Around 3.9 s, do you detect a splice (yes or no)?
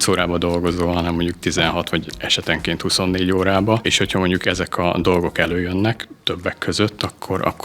yes